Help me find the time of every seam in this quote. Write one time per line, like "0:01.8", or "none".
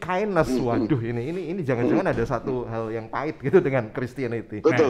none